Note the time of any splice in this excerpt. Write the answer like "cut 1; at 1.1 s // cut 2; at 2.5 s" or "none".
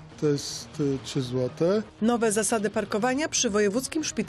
cut 1; at 1.9 s